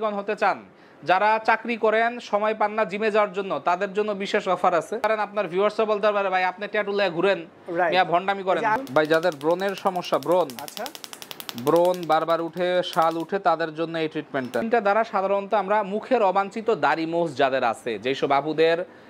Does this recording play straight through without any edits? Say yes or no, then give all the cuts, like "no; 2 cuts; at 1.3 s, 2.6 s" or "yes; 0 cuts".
no; 3 cuts; at 5.0 s, 8.8 s, 14.7 s